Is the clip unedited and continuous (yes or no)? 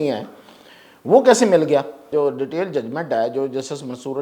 no